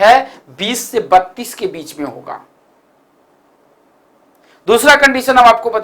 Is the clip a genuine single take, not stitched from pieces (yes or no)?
yes